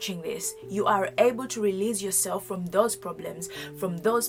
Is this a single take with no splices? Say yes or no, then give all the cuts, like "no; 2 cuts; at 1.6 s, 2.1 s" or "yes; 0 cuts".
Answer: yes; 0 cuts